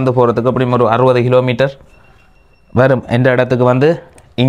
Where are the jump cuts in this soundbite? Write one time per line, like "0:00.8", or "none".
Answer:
none